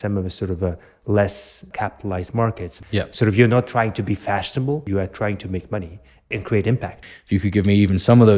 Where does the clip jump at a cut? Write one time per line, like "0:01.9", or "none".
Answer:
0:01.7
0:02.7
0:04.8
0:06.3
0:07.1